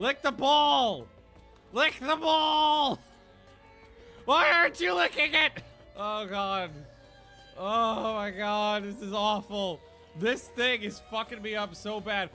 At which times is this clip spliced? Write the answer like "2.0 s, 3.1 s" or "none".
5.4 s